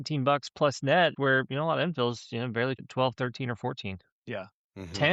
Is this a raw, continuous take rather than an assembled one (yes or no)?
no